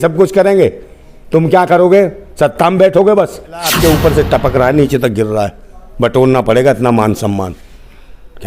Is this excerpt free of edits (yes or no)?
no